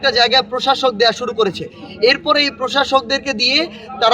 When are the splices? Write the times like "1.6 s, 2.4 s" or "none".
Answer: none